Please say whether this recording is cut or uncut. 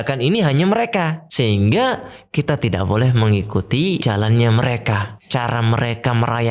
cut